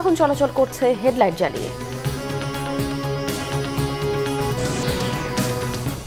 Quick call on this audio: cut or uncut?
cut